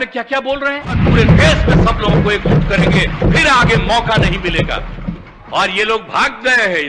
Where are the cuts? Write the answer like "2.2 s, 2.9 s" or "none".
1.0 s